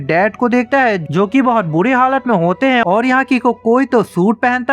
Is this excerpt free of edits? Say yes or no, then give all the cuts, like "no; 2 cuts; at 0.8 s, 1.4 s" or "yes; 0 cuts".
no; 1 cut; at 2.8 s